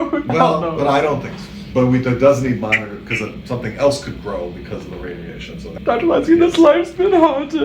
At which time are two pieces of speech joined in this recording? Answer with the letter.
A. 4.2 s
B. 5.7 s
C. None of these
B